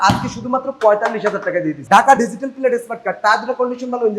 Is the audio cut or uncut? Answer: cut